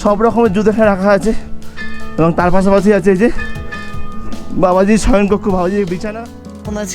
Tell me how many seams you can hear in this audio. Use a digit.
1